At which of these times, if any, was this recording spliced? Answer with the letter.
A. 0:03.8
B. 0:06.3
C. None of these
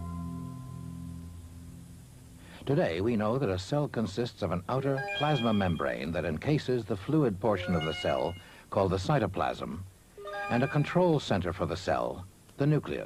C